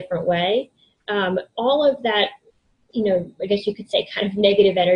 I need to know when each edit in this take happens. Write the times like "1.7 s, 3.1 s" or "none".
none